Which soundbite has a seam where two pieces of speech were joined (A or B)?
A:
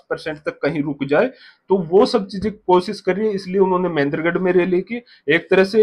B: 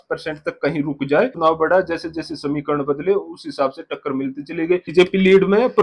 B